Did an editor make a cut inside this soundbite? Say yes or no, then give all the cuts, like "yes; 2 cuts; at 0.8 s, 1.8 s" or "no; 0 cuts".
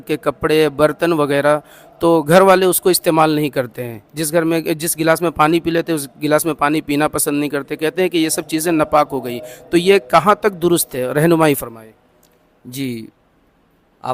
no; 0 cuts